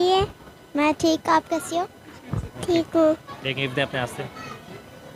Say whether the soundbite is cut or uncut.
uncut